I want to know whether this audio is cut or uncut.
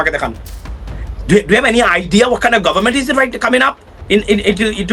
uncut